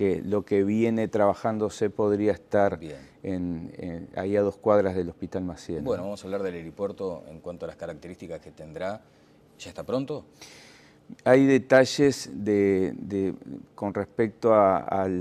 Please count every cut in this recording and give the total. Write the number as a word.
one